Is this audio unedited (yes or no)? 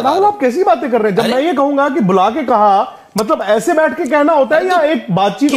yes